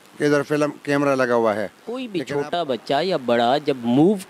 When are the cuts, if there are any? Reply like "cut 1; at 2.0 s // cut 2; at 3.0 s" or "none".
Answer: cut 1; at 2.1 s